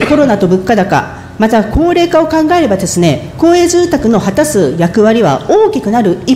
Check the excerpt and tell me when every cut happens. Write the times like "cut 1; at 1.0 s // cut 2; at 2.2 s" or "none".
none